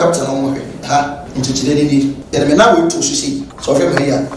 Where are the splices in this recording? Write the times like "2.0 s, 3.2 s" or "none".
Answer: 1.2 s, 2.2 s, 3.5 s